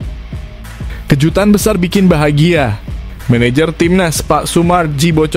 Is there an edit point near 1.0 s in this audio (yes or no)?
yes